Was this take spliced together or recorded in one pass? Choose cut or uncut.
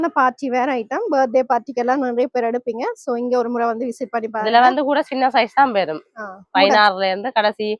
uncut